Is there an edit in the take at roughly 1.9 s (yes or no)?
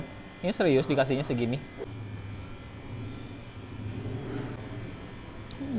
yes